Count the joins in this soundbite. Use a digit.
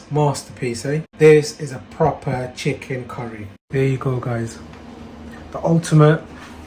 2